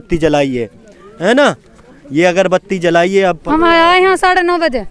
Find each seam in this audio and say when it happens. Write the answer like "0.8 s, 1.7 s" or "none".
3.4 s